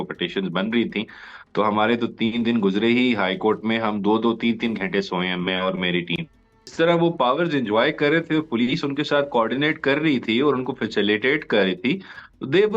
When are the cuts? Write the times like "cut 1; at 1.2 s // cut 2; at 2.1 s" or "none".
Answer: cut 1; at 6.7 s